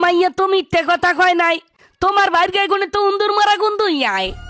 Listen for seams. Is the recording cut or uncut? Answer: uncut